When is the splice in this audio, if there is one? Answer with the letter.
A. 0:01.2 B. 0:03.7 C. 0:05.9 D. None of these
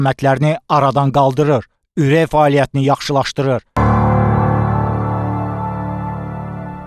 B